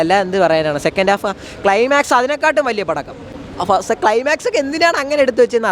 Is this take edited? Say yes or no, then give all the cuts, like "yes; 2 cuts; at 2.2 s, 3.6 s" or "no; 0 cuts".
no; 0 cuts